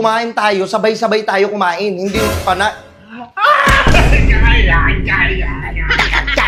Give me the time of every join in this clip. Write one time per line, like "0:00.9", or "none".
none